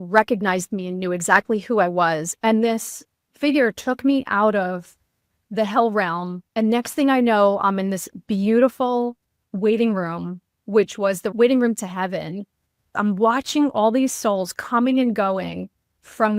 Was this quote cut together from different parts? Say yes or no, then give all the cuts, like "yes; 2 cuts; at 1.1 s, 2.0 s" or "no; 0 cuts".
yes; 2 cuts; at 11.3 s, 12.8 s